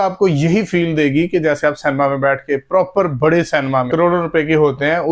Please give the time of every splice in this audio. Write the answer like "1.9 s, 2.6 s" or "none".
3.9 s